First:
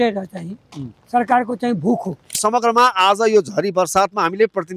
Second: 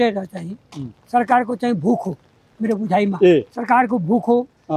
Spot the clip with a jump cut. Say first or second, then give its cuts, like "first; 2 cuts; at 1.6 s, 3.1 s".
first; 1 cut; at 2.4 s